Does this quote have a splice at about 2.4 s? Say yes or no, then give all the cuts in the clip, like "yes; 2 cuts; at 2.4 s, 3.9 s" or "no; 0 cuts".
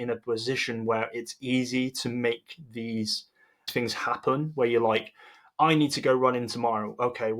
no; 1 cut; at 3.7 s